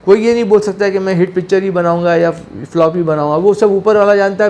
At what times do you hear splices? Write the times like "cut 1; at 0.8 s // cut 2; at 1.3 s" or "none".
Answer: none